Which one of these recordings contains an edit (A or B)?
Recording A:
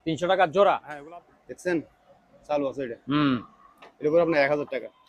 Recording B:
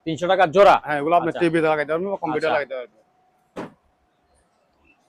A